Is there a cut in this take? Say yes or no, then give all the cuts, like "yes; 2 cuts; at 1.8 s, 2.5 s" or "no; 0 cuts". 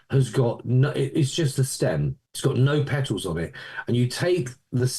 yes; 1 cut; at 2.2 s